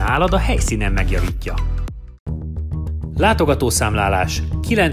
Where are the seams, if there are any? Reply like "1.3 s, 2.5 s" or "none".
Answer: none